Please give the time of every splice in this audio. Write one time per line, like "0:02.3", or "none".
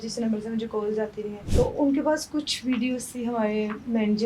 0:01.4

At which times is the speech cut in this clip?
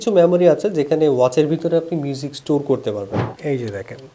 0:03.2

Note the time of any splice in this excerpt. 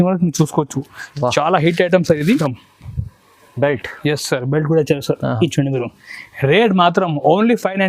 0:02.4

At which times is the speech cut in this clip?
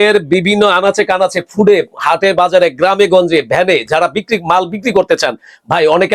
none

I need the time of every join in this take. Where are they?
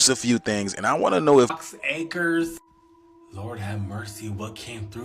0:01.5

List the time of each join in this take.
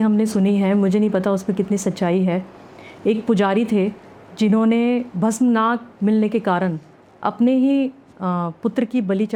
none

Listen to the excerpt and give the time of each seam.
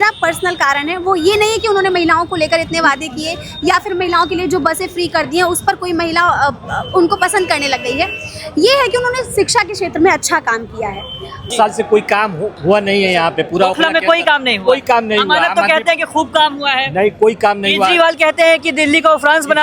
0:11.5

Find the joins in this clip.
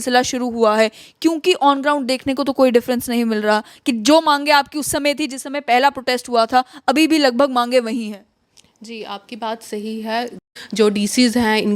0:10.6

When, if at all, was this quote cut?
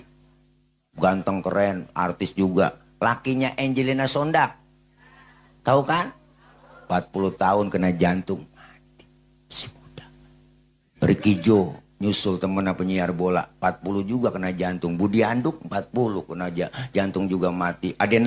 none

